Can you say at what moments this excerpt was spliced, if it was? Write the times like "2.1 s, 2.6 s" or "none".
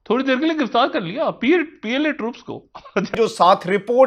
3.1 s